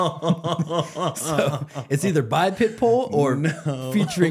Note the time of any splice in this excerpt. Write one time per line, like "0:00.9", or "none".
none